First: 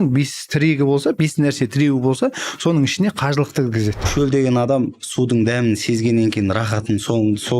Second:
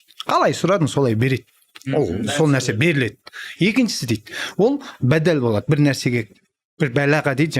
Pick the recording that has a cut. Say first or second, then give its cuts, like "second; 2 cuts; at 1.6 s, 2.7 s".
first; 1 cut; at 4.1 s